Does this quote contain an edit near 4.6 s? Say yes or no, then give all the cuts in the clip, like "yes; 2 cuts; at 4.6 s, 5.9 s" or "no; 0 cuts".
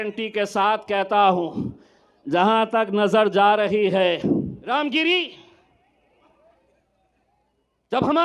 yes; 1 cut; at 4.6 s